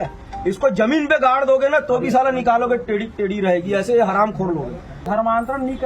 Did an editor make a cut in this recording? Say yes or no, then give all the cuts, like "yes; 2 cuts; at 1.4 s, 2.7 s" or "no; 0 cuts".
yes; 1 cut; at 4.9 s